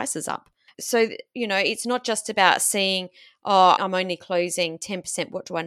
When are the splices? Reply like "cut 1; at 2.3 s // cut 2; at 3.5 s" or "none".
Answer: none